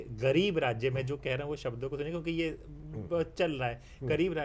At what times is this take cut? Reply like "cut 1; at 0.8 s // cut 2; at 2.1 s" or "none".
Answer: none